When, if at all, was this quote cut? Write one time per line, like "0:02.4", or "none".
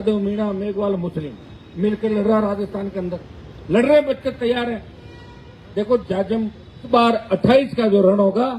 0:06.9